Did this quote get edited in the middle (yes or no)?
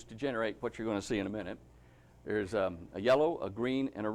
yes